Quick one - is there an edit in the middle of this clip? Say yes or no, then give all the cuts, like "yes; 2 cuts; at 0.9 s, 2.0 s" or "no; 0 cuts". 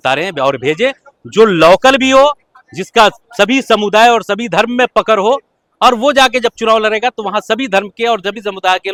no; 0 cuts